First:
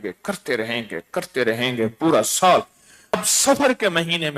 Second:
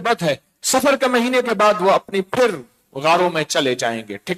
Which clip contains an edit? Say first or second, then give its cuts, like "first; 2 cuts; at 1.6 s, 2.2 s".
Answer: first; 1 cut; at 3.2 s